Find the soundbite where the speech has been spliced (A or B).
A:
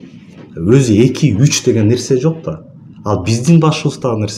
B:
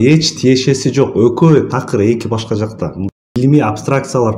B